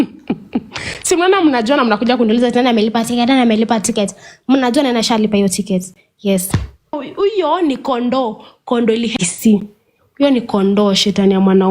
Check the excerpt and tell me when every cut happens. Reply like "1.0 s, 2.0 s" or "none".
7.0 s